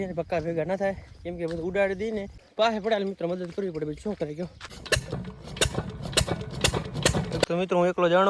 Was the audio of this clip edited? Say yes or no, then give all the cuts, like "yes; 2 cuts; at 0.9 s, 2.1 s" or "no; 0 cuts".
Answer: yes; 3 cuts; at 2.4 s, 4.7 s, 7.5 s